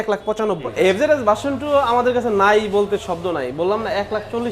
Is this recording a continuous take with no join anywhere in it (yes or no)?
no